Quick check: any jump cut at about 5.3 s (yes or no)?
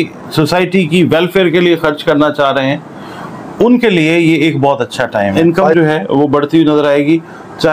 yes